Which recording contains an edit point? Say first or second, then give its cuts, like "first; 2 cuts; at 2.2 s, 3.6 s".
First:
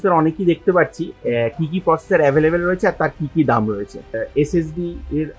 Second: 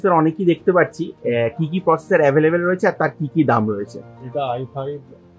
first; 1 cut; at 4.1 s